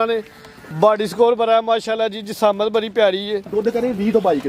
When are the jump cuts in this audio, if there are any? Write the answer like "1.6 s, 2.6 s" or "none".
3.5 s